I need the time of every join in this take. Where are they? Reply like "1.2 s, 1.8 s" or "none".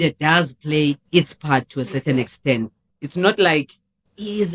none